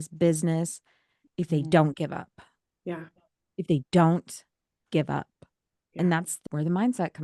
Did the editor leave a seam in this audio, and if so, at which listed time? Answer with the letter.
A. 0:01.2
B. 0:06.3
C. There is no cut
B